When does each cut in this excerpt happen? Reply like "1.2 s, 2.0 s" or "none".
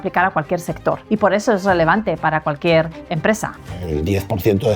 1.0 s, 3.5 s